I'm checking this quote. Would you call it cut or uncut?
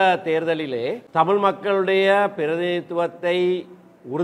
cut